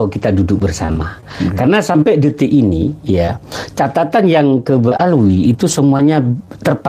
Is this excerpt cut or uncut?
uncut